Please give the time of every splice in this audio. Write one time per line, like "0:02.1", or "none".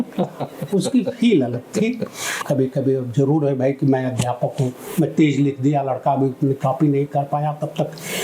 0:02.3